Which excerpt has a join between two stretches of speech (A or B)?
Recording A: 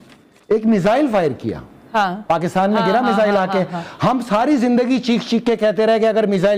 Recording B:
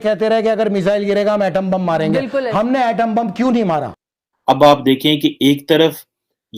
B